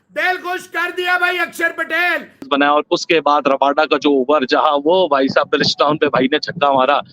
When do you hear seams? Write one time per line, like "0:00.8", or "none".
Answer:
0:02.4